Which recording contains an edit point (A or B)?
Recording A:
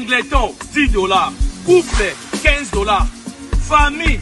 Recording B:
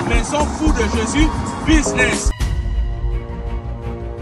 B